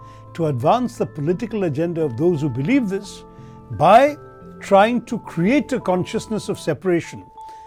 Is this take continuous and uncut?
yes; 0 cuts

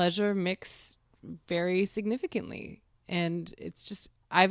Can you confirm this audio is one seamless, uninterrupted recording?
yes; 0 cuts

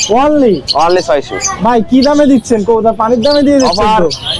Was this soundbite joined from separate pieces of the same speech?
no; 0 cuts

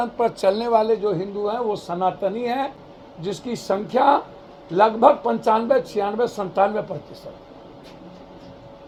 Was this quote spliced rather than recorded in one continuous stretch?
no; 0 cuts

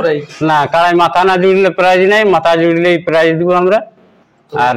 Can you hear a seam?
no; 0 cuts

